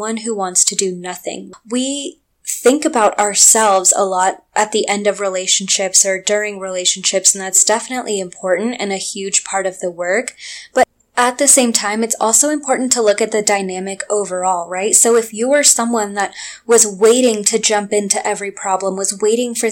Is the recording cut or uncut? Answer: cut